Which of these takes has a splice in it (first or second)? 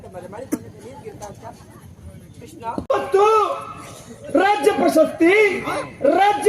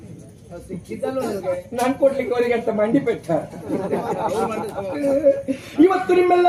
first